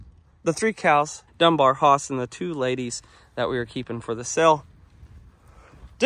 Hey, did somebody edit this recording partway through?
yes; 1 cut; at 1.2 s

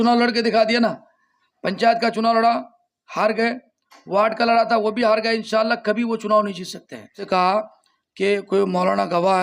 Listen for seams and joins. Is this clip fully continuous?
no; 1 cut; at 7.2 s

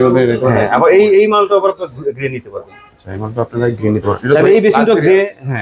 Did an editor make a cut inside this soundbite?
no; 0 cuts

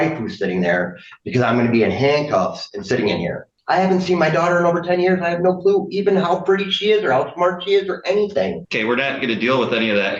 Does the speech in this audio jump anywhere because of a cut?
yes; 1 cut; at 3.6 s

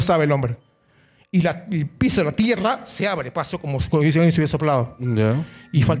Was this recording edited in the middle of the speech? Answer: no; 0 cuts

